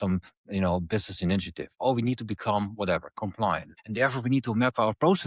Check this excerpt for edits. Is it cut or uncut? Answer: cut